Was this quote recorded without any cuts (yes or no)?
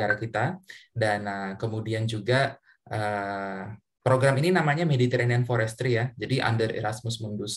yes